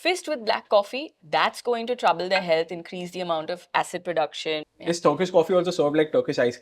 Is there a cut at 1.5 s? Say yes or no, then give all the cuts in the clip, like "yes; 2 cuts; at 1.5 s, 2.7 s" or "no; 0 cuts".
no; 1 cut; at 4.7 s